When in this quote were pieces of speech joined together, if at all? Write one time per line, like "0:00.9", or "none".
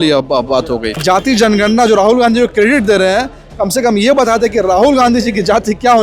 0:01.0